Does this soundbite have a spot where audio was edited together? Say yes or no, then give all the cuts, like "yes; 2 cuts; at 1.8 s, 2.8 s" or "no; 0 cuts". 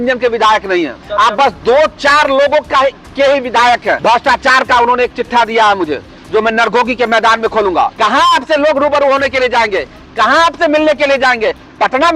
yes; 3 cuts; at 1.0 s, 4.0 s, 7.9 s